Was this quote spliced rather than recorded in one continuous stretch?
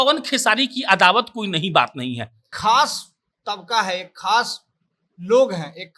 yes; 1 cut; at 2.5 s

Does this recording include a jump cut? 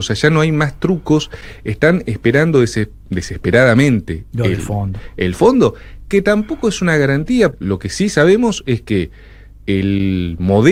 no; 0 cuts

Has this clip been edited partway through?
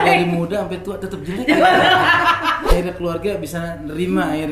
yes; 1 cut; at 2.7 s

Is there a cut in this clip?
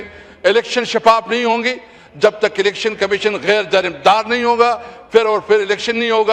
no; 0 cuts

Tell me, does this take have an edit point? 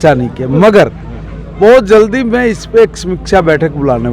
no; 0 cuts

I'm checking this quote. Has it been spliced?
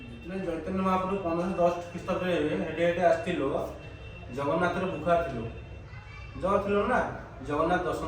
no; 0 cuts

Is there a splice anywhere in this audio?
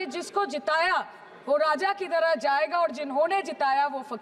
no; 0 cuts

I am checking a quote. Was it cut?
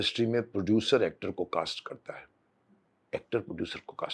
no; 0 cuts

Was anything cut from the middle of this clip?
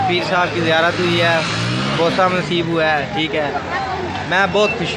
no; 0 cuts

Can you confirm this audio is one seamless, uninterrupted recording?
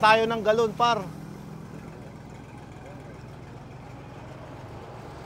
yes; 0 cuts

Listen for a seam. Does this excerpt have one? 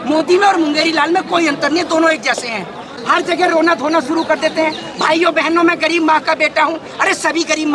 yes; 1 cut; at 2.9 s

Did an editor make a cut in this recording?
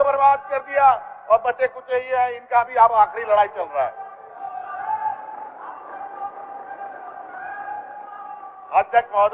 no; 0 cuts

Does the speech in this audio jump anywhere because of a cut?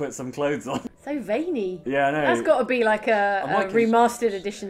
yes; 2 cuts; at 0.8 s, 1.8 s

